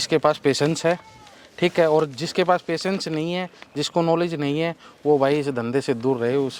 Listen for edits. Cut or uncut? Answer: uncut